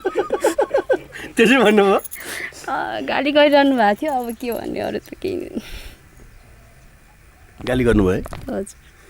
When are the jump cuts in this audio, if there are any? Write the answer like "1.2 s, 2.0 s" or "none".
none